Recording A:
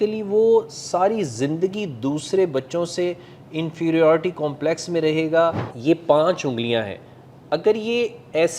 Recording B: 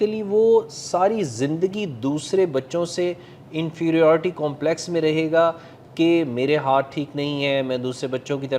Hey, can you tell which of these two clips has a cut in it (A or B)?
A